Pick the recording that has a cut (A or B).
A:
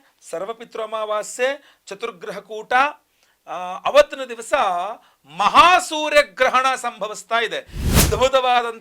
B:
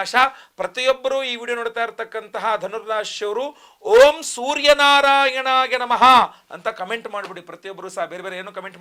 A